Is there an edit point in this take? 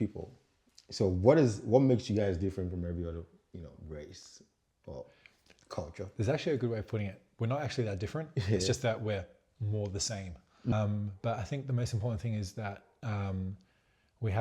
yes; 1 cut; at 10.7 s

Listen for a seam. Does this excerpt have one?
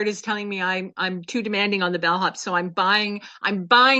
no; 0 cuts

